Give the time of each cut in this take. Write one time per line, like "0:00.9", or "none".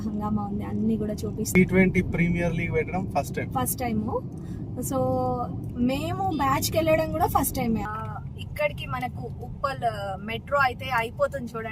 0:01.5
0:07.9